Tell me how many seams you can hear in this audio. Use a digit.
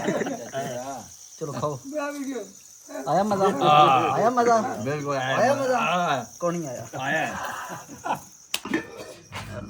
1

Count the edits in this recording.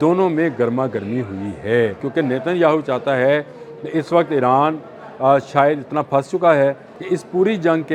2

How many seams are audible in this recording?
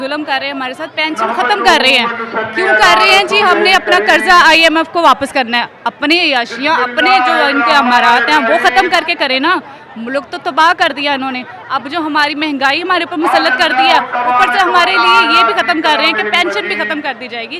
0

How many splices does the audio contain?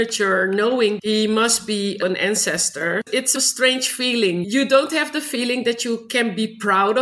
4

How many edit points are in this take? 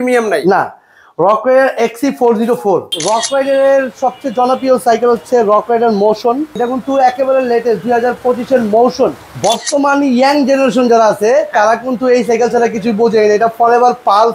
3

